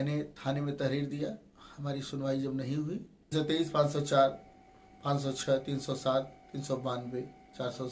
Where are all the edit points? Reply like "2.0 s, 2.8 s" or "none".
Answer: 3.3 s